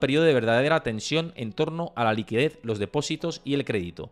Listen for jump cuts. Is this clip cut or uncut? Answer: uncut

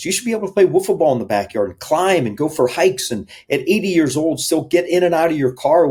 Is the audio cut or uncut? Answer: uncut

